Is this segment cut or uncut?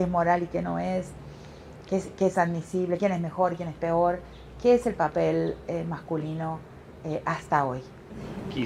uncut